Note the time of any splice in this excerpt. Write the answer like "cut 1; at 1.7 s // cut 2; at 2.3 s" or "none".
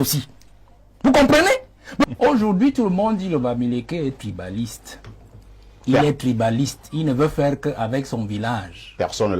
cut 1; at 2.0 s